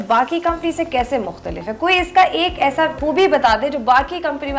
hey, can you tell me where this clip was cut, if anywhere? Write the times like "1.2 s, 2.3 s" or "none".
3.0 s